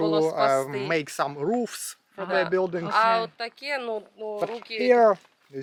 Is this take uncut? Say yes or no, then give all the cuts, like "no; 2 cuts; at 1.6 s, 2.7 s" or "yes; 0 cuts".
yes; 0 cuts